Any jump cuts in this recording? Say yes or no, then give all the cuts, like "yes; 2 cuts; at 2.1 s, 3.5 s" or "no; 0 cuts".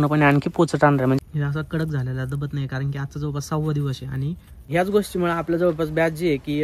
yes; 2 cuts; at 1.2 s, 4.6 s